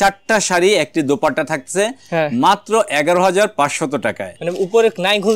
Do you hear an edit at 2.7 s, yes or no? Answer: no